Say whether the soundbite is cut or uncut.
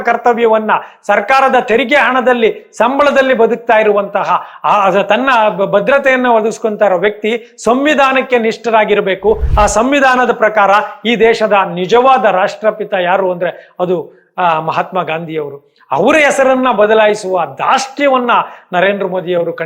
uncut